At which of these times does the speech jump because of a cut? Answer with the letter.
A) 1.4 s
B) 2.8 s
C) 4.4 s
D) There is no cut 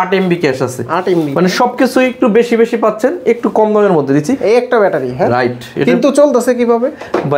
C